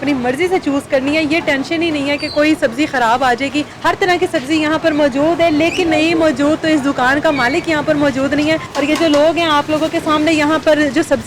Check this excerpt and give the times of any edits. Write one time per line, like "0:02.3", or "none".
0:03.7
0:08.7